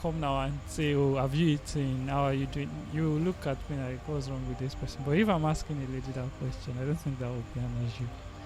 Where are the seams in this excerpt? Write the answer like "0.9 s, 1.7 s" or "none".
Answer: none